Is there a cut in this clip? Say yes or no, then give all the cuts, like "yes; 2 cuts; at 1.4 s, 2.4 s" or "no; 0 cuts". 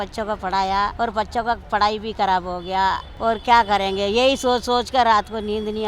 yes; 2 cuts; at 0.9 s, 3.1 s